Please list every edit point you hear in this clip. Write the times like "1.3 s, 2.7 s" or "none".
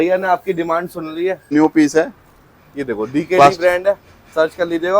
1.5 s